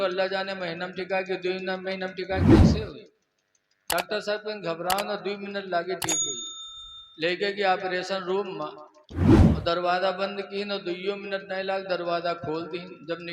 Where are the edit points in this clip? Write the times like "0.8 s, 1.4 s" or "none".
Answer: 2.4 s, 2.8 s, 9.0 s, 9.6 s

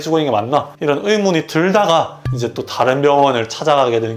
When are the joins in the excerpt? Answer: none

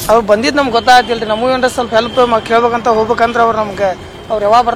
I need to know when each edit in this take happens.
none

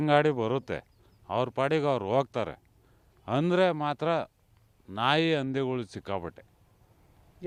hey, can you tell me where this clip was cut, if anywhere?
none

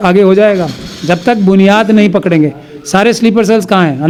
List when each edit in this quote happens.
none

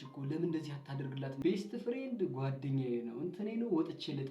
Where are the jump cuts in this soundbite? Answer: 1.4 s

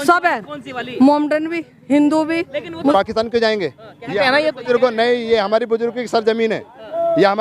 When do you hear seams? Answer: 2.9 s

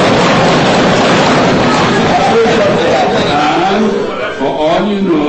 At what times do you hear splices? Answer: none

